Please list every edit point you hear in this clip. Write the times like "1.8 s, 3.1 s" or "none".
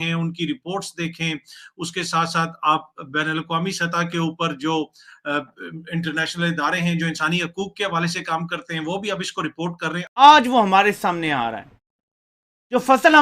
10.0 s